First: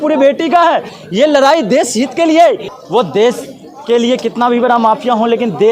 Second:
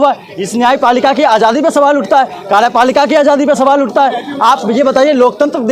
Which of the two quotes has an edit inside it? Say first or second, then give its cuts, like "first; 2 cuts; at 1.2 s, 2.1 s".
first; 2 cuts; at 1.0 s, 2.7 s